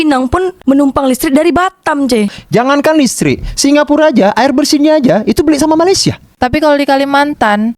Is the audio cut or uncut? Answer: cut